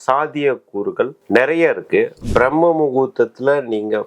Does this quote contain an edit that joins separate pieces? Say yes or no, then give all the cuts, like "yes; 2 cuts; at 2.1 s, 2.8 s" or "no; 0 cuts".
yes; 1 cut; at 2.2 s